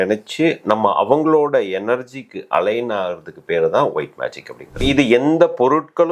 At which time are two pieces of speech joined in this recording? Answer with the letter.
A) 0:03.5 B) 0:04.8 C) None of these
B